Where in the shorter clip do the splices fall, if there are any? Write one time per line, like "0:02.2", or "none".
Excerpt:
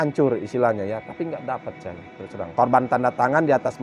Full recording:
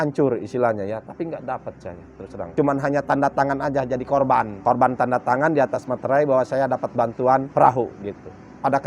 0:02.5